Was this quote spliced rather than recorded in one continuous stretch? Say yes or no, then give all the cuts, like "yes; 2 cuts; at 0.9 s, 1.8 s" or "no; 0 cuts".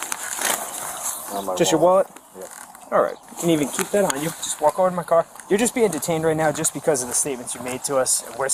no; 0 cuts